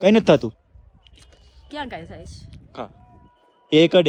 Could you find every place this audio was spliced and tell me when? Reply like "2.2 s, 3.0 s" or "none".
none